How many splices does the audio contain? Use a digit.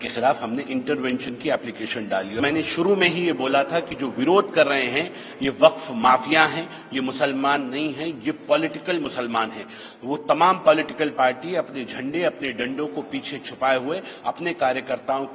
1